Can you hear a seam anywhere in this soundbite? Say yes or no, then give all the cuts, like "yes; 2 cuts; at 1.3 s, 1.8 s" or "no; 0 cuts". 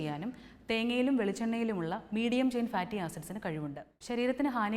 no; 0 cuts